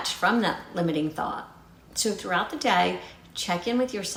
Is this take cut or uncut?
uncut